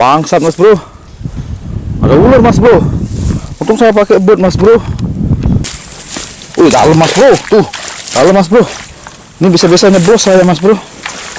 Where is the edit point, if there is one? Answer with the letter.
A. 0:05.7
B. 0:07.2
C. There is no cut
A